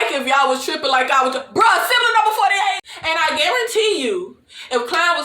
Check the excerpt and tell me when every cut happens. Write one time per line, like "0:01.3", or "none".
0:02.9

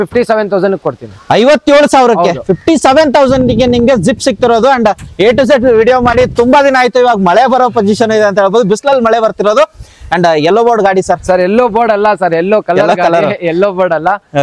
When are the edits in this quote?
none

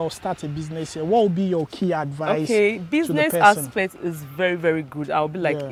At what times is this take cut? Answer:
none

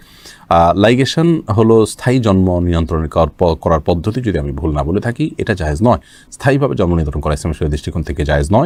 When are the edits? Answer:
none

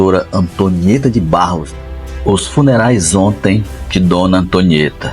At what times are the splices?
0:01.7

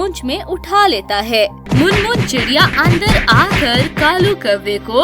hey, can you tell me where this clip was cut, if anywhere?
0:01.6

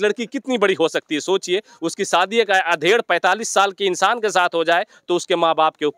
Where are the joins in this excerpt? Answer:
none

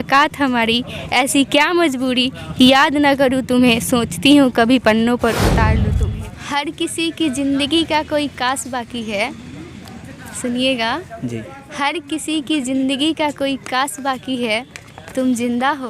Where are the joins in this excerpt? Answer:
0:05.8

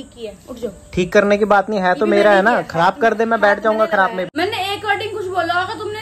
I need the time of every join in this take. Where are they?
0:04.3

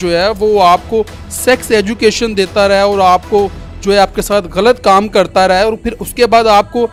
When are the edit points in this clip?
none

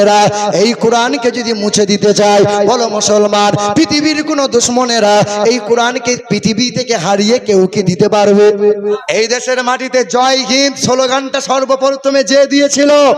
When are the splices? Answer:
0:08.8

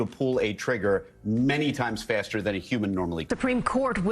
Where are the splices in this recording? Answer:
0:03.2

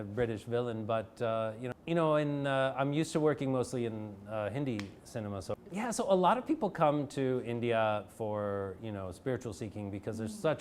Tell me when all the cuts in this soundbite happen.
0:01.7
0:05.5

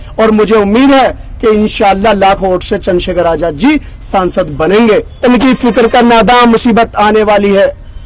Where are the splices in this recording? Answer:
0:05.2

